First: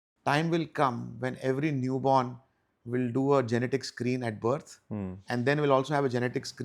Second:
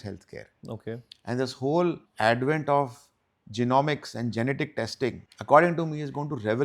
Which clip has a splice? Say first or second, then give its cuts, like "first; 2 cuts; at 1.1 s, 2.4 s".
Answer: second; 2 cuts; at 2.1 s, 5.3 s